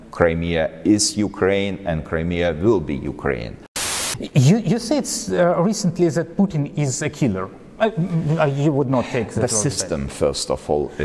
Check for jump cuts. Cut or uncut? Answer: cut